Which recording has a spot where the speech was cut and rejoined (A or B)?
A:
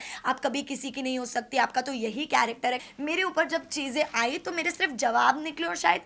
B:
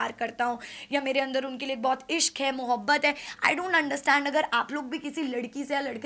A